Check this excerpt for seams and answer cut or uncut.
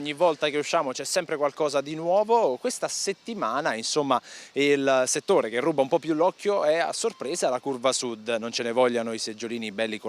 cut